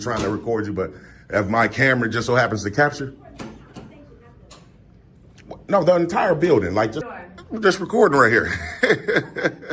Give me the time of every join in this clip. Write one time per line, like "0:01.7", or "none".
0:07.1

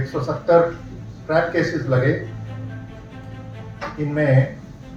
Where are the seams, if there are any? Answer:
none

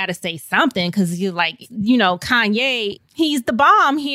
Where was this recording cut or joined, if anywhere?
0:01.6

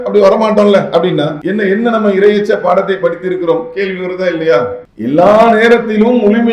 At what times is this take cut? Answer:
0:01.4
0:04.9

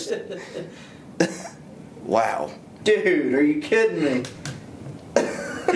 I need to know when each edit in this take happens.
0:02.7

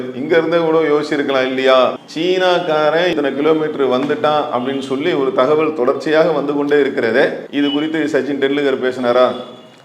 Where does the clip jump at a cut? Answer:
0:02.0
0:03.1
0:07.4

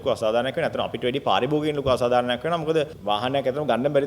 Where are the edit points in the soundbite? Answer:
0:02.9

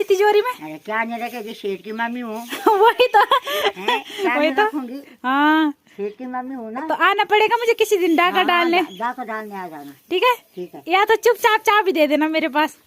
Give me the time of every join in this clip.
none

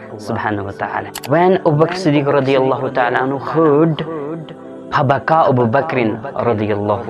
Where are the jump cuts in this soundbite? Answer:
0:01.2

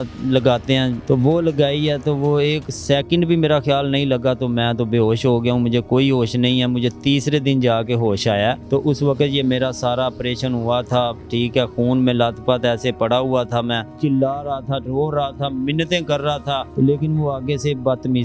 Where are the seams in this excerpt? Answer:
0:01.0
0:08.6
0:13.9
0:16.7

